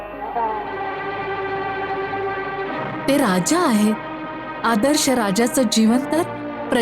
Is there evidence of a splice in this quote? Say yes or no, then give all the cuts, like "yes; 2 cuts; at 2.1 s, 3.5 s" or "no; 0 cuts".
no; 0 cuts